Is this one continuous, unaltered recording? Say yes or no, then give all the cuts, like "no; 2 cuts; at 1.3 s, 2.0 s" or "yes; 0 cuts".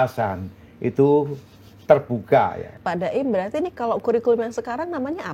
no; 1 cut; at 2.7 s